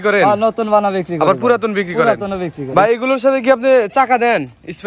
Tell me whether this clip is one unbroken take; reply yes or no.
no